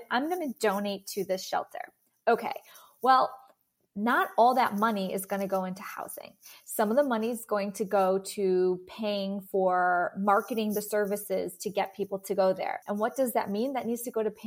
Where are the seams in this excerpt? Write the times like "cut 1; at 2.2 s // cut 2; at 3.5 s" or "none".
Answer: cut 1; at 12.8 s